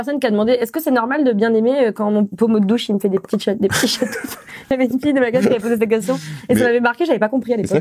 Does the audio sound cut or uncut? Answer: cut